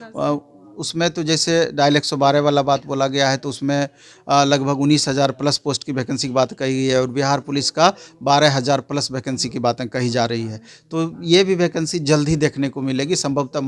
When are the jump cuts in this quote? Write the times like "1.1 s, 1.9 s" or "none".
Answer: none